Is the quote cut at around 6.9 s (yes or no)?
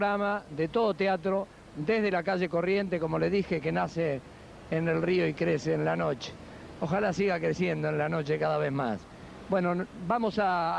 no